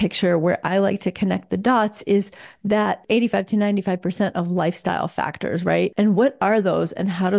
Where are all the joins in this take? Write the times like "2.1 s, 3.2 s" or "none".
3.0 s, 5.9 s